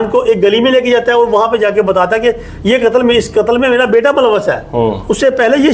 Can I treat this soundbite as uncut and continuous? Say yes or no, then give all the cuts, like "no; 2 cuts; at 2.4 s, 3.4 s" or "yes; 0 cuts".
yes; 0 cuts